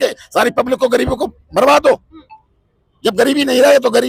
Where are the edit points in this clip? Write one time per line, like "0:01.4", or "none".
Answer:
none